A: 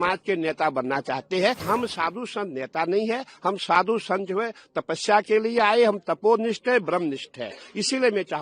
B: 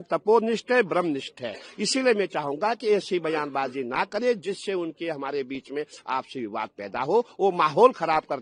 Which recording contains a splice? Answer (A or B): A